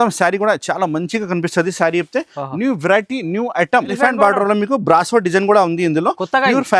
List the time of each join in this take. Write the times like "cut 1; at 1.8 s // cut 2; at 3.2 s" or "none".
cut 1; at 3.9 s